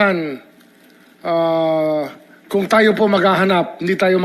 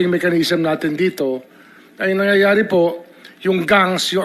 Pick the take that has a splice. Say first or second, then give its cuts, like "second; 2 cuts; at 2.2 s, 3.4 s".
second; 1 cut; at 2.5 s